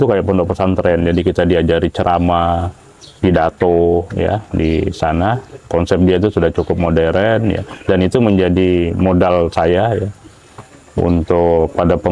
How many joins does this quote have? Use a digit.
0